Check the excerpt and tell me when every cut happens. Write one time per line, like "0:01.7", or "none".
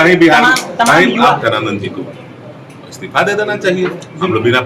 0:01.4